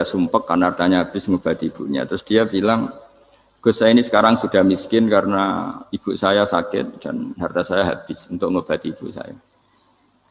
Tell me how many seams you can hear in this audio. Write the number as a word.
zero